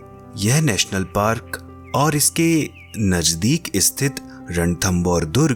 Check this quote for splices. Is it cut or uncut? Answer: uncut